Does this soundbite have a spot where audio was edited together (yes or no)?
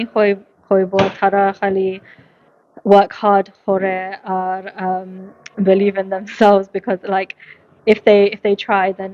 no